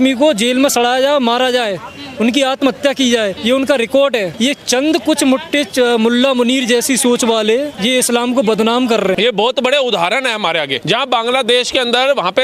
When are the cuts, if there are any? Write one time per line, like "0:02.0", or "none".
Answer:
0:03.4
0:04.3
0:07.7
0:09.2
0:10.8